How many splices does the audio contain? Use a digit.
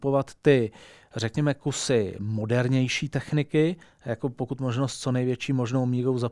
0